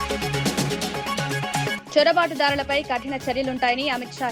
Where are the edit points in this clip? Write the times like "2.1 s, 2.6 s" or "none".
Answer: 1.7 s